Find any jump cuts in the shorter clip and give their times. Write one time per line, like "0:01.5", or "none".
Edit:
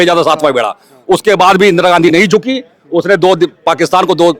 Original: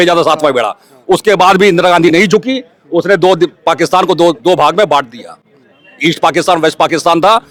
none